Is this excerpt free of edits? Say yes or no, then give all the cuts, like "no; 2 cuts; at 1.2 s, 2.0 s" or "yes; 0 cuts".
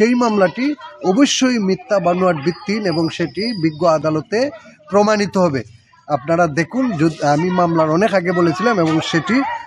yes; 0 cuts